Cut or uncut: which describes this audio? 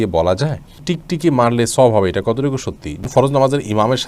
cut